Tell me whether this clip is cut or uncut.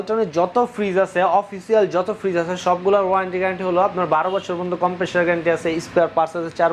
uncut